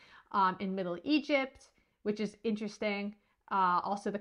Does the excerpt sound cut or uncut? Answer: uncut